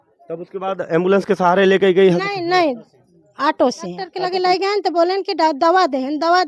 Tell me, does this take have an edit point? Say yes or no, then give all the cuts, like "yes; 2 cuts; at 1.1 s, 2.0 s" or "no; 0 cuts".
yes; 1 cut; at 4.1 s